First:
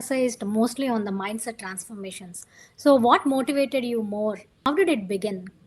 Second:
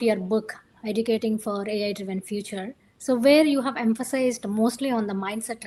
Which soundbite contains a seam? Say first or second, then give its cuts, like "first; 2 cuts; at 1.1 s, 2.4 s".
first; 1 cut; at 4.6 s